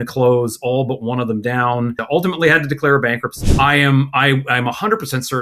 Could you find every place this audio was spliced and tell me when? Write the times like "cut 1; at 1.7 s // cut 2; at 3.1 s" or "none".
cut 1; at 2.0 s // cut 2; at 3.4 s